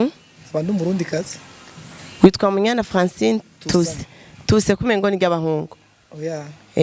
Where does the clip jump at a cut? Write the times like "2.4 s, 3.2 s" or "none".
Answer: none